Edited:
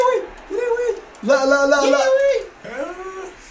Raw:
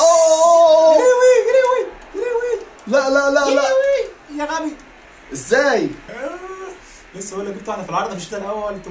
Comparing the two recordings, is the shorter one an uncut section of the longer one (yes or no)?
no